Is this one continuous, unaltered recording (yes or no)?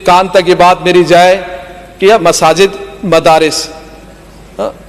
yes